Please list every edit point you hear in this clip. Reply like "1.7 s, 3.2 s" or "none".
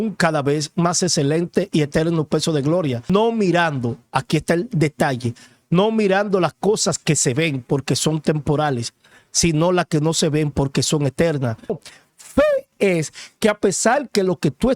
3.1 s, 11.8 s